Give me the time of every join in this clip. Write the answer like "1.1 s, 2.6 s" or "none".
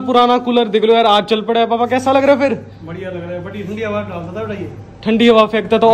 none